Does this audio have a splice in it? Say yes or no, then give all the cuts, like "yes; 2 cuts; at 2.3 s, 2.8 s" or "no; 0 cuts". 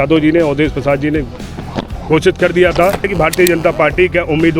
yes; 1 cut; at 3.1 s